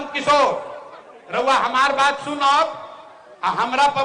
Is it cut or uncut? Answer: uncut